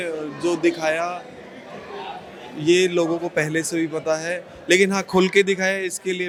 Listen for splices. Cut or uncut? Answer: uncut